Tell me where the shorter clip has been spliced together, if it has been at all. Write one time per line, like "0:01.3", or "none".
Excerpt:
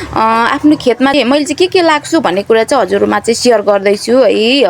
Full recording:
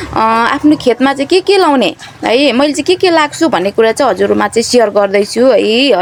0:01.1